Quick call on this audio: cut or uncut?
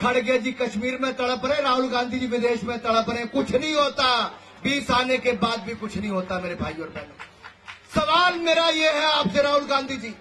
uncut